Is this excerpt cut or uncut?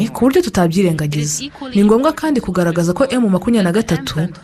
cut